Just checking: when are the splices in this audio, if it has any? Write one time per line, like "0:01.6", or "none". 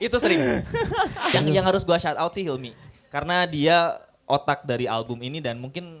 0:01.3